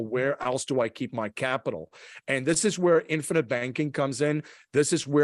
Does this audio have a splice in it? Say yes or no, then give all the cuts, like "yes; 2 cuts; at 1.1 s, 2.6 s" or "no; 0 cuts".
no; 0 cuts